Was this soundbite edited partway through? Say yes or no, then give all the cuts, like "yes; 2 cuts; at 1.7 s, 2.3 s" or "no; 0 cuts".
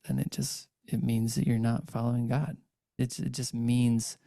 yes; 1 cut; at 2.9 s